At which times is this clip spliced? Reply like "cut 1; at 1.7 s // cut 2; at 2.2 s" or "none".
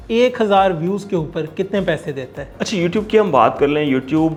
none